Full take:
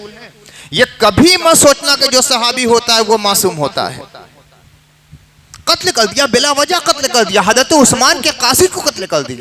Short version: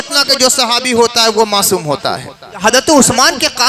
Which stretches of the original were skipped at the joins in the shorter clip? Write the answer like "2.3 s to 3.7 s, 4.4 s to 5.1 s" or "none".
4.3 s to 7.4 s

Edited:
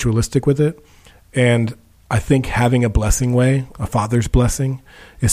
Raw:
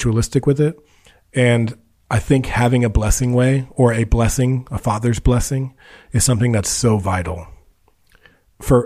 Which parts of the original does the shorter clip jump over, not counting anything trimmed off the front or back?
3.7 s to 4.6 s

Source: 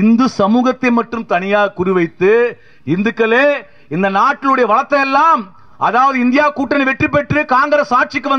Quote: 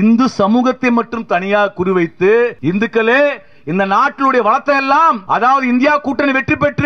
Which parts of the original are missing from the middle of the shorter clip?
2.6 s to 2.8 s, 5.5 s to 5.7 s

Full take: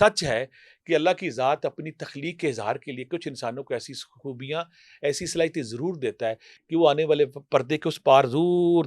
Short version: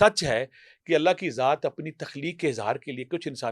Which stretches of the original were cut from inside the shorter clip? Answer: none

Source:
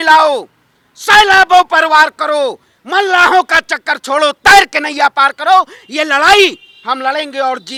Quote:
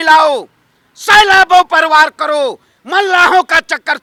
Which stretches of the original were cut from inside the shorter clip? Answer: none

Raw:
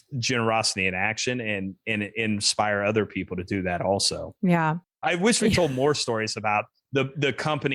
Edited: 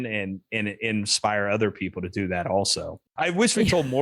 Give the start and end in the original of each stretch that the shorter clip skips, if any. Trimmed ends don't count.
4.3 s to 4.8 s

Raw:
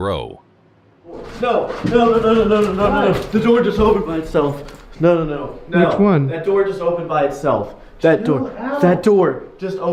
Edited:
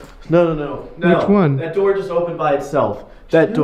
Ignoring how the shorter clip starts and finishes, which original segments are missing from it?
none

